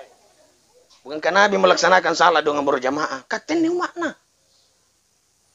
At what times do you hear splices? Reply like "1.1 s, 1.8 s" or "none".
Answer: 1.2 s